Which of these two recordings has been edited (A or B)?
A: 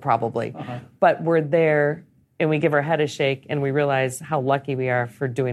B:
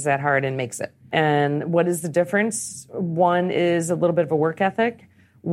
B